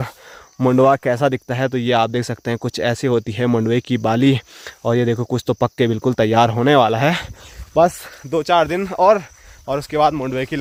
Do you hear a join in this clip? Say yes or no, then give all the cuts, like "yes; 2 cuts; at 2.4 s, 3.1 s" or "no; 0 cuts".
no; 0 cuts